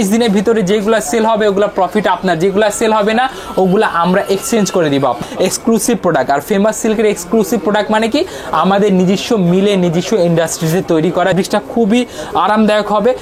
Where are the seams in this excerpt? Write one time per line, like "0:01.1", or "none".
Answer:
0:05.2
0:11.3